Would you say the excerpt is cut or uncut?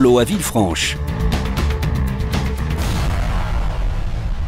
cut